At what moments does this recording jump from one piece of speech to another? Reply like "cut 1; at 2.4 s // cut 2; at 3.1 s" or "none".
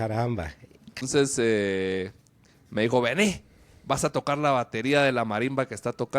cut 1; at 1.0 s